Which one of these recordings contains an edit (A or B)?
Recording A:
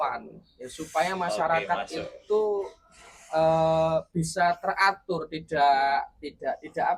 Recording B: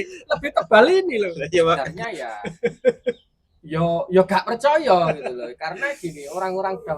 B